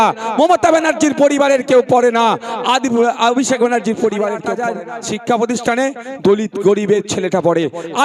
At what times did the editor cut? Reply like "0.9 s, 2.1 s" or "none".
4.5 s